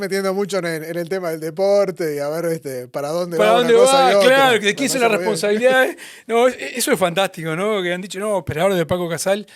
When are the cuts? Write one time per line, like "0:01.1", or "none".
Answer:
none